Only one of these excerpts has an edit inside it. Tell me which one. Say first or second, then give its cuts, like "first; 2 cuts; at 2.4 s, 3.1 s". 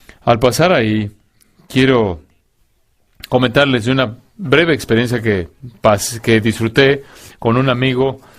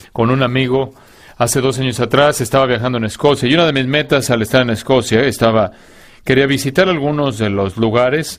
first; 1 cut; at 6.1 s